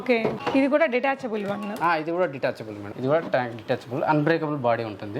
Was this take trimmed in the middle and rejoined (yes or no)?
yes